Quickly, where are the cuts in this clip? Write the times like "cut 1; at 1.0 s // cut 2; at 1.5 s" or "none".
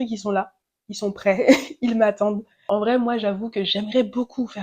cut 1; at 2.5 s